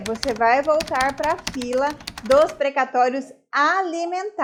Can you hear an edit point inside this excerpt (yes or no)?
no